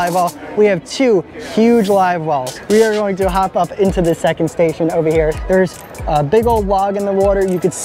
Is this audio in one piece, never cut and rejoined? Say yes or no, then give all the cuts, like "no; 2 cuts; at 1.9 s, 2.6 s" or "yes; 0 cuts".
no; 2 cuts; at 2.5 s, 5.4 s